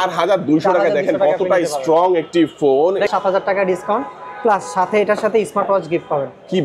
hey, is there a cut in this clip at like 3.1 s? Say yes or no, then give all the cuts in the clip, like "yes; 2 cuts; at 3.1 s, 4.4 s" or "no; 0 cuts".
yes; 1 cut; at 3.1 s